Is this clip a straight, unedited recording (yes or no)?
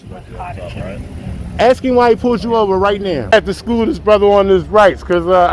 no